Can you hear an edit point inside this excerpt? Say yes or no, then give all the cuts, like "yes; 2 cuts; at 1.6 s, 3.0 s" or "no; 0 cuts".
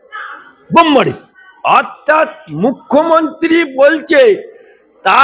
no; 0 cuts